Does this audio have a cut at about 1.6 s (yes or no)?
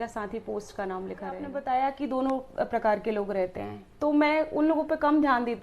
yes